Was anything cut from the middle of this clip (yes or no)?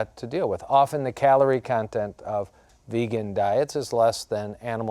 no